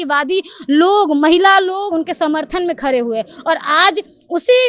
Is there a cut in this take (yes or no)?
yes